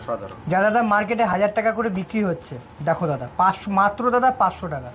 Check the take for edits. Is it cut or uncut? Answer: uncut